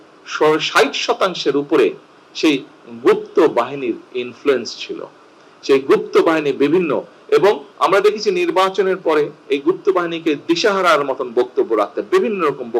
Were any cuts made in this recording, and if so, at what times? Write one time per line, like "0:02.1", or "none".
0:07.7